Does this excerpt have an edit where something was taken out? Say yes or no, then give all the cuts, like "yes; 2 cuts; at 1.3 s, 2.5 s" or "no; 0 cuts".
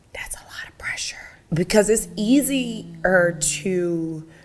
yes; 1 cut; at 1.4 s